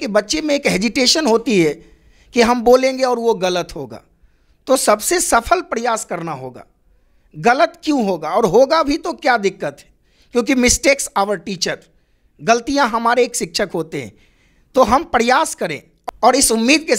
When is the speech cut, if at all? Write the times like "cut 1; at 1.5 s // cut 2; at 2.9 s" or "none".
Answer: cut 1; at 15.9 s